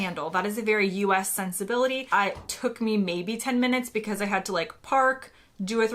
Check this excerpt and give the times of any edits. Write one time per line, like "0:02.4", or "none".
0:02.0